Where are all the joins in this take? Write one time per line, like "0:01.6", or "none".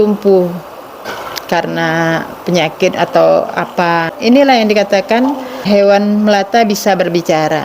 0:01.0
0:04.1
0:05.6